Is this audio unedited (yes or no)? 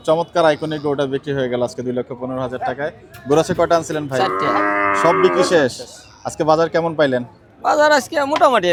yes